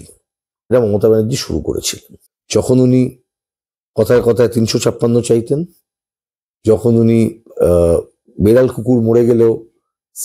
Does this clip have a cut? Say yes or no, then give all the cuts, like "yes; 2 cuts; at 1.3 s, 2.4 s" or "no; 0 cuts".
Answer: no; 0 cuts